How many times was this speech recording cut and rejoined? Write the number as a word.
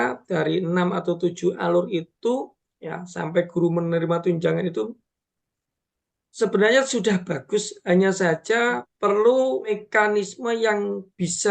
two